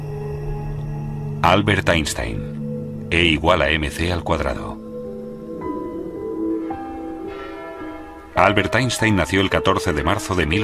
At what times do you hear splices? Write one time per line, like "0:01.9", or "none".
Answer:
0:08.5